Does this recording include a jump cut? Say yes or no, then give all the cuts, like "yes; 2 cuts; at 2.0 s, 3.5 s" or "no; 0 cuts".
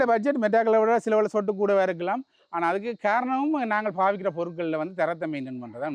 no; 0 cuts